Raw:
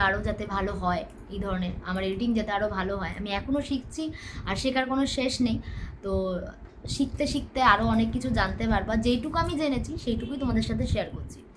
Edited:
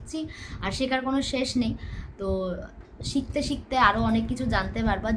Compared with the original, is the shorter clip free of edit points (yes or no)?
yes